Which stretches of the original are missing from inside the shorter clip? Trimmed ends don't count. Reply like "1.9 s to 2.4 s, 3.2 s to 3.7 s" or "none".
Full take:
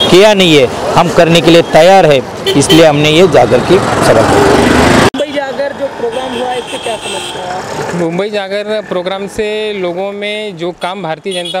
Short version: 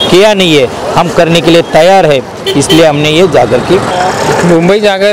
3.9 s to 7.4 s